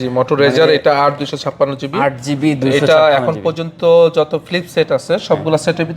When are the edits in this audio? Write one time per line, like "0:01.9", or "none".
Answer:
none